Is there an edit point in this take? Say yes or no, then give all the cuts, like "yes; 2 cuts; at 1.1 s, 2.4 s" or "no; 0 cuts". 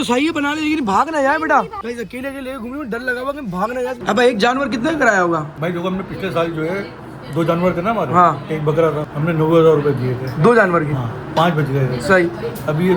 yes; 2 cuts; at 4.0 s, 5.5 s